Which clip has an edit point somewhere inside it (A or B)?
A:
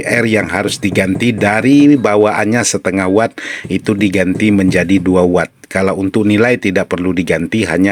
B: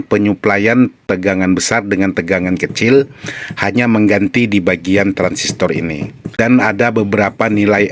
B